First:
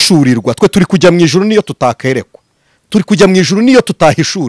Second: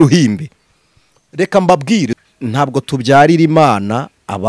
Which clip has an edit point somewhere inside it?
second; 1 cut; at 2.1 s

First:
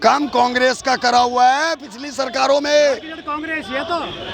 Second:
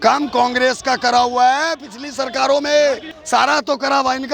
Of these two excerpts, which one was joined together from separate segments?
second; 1 cut; at 3.1 s

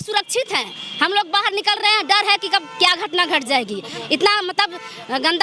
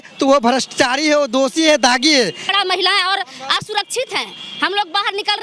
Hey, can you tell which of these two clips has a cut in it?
second; 1 cut; at 2.5 s

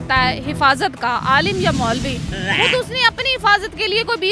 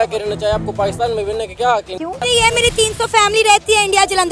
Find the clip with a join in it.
second; 1 cut; at 2.2 s

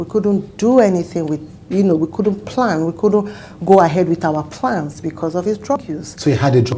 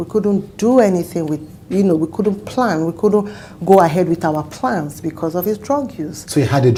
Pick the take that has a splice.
first; 1 cut; at 5.8 s

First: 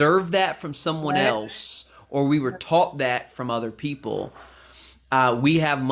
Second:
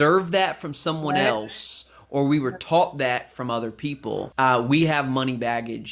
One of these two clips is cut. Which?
second; 1 cut; at 4.3 s

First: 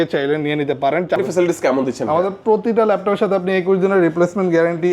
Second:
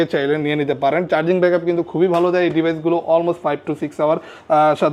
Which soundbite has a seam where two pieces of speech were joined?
first; 1 cut; at 1.2 s

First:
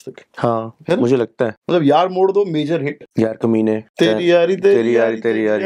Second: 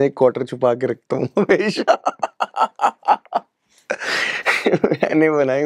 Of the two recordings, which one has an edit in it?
first; 3 cuts; at 1.6 s, 3.0 s, 3.9 s

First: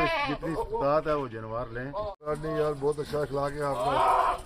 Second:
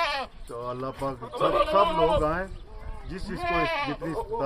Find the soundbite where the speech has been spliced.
first; 1 cut; at 2.3 s

